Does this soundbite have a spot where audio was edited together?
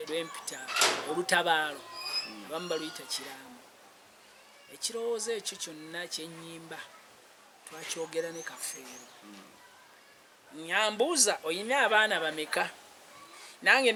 no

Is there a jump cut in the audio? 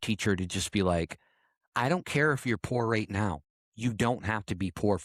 no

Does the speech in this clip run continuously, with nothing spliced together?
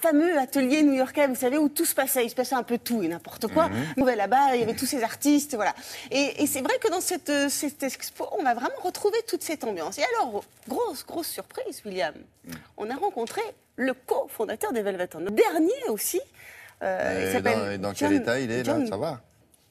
yes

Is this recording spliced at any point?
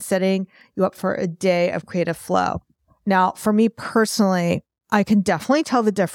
no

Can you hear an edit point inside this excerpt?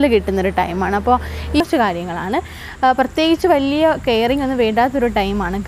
yes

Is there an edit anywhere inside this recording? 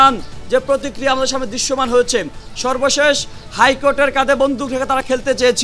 no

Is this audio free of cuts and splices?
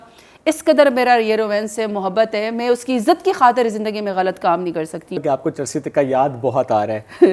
no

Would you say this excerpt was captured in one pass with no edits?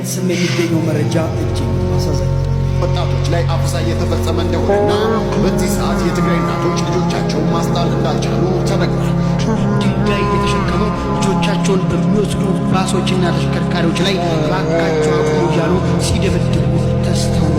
yes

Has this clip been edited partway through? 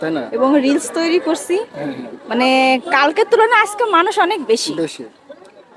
no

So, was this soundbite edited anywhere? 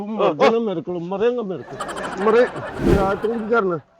yes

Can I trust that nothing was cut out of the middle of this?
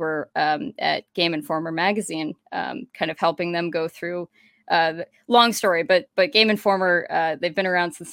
yes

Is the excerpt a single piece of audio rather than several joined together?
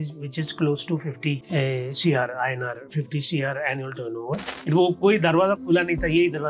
no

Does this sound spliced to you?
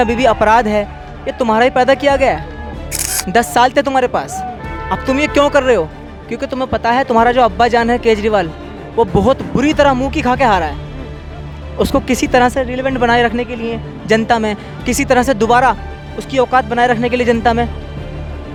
no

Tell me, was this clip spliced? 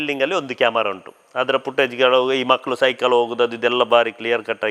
no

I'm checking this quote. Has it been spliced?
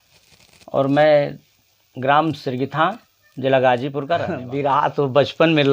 yes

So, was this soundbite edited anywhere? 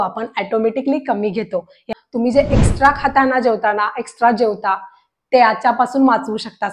yes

